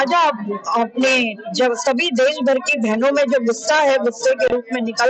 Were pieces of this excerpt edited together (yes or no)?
no